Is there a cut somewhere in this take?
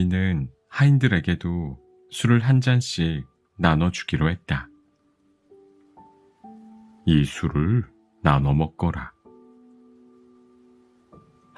no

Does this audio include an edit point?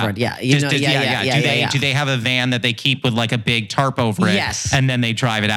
no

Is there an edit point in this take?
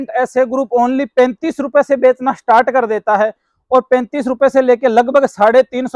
no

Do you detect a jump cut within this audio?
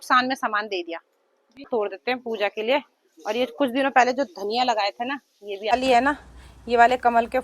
yes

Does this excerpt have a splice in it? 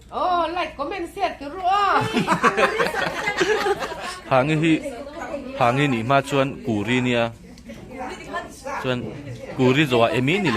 yes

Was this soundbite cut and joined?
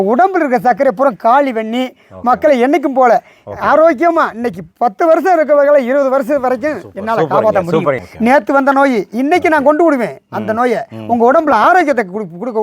yes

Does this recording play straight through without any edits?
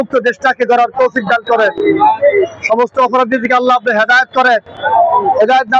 yes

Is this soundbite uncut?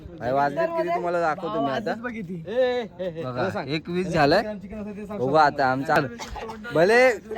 no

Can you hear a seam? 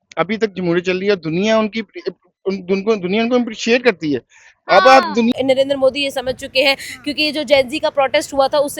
yes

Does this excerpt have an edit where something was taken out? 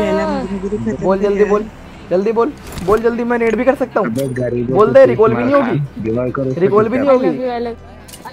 no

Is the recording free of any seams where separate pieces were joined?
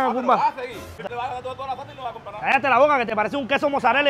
no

